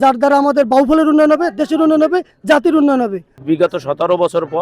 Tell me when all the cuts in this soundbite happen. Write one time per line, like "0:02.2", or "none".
0:03.3